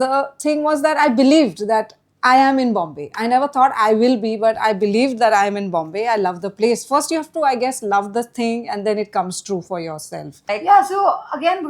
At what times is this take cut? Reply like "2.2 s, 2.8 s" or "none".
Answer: 10.5 s